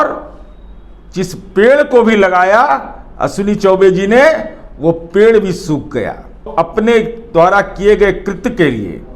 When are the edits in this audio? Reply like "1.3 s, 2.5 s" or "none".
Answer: 6.5 s